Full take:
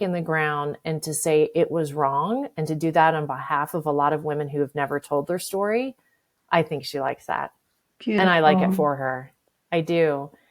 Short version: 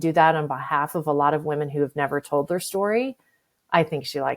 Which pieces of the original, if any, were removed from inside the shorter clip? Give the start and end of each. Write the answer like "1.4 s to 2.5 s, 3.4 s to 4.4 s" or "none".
none